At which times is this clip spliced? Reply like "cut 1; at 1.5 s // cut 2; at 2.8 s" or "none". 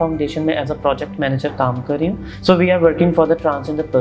cut 1; at 2.3 s